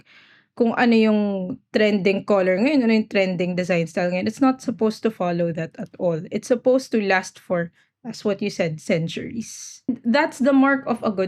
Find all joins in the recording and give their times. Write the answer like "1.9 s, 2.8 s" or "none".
9.9 s